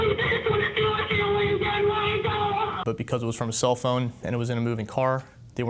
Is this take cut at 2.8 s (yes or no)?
yes